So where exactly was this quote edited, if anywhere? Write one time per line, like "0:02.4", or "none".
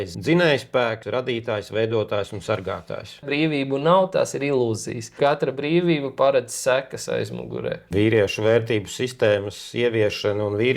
0:01.0
0:03.3
0:07.8